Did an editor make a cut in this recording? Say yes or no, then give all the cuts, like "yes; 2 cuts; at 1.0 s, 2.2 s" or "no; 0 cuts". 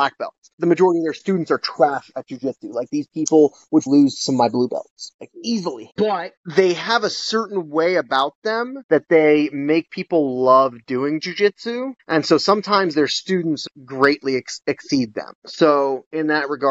yes; 3 cuts; at 3.9 s, 5.8 s, 13.6 s